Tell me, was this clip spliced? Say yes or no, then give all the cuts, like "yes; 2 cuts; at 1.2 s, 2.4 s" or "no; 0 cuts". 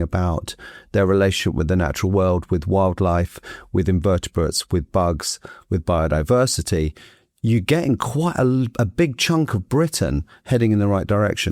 no; 0 cuts